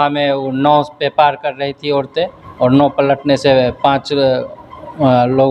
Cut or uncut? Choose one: uncut